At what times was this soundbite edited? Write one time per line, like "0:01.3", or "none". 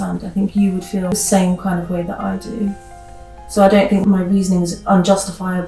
0:01.1
0:04.0